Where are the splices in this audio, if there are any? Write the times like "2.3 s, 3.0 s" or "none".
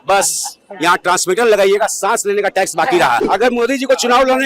3.2 s